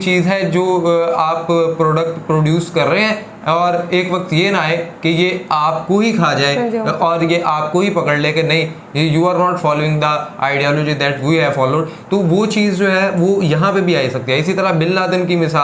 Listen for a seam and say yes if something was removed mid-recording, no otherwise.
no